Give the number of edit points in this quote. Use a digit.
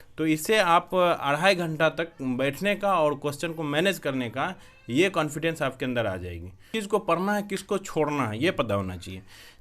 1